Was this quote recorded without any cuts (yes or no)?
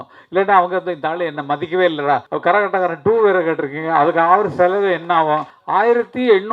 no